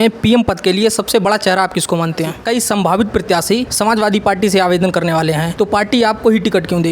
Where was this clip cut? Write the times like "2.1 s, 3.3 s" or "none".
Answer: 2.4 s, 3.7 s, 5.5 s